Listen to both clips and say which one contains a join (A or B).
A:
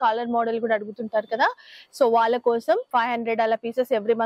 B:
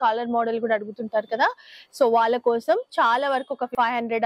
A